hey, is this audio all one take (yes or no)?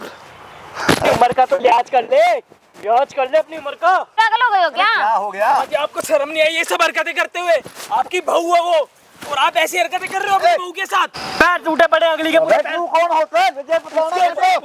no